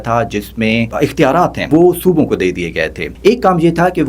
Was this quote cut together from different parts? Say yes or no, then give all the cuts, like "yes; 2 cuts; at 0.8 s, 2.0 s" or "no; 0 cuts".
yes; 2 cuts; at 1.6 s, 3.1 s